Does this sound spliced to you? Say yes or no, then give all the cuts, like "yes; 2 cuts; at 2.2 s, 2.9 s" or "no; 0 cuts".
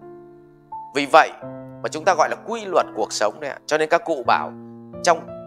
yes; 1 cut; at 0.9 s